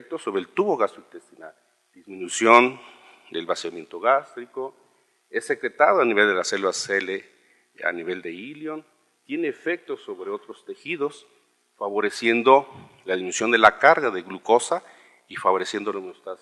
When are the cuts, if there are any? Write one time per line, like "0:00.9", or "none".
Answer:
0:02.7